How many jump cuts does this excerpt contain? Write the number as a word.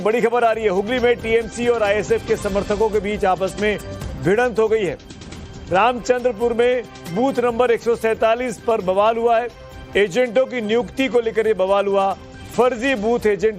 one